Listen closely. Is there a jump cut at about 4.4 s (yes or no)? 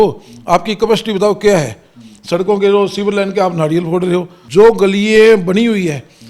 yes